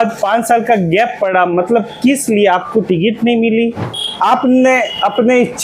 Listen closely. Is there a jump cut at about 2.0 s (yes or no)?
no